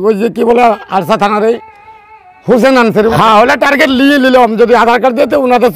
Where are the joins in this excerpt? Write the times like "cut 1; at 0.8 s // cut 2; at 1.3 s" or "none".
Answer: cut 1; at 3.1 s